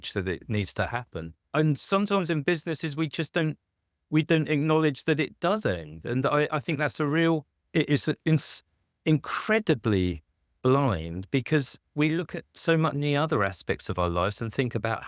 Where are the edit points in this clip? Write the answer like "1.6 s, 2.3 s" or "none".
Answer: 1.4 s